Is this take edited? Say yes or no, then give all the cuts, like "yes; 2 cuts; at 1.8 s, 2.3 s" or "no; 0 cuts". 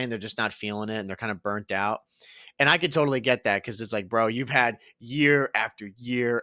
no; 0 cuts